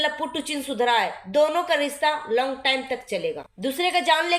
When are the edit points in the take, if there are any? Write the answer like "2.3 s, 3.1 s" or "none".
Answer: 3.5 s